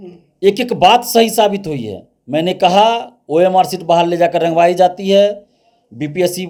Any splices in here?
no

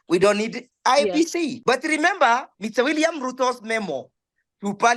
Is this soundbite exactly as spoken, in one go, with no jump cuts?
no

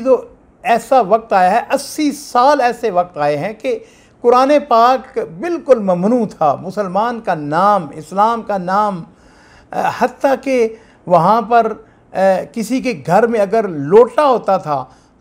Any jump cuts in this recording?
no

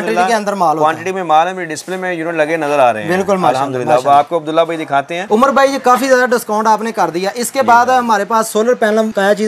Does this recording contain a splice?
no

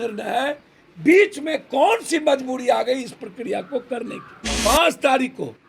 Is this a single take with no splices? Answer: no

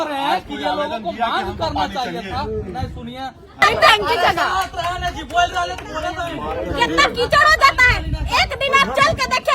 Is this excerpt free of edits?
no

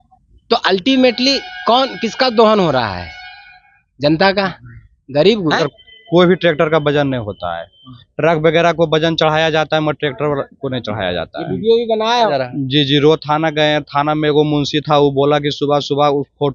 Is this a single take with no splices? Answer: no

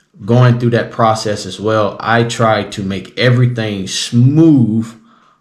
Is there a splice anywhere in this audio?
no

